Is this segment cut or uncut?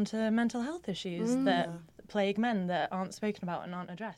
uncut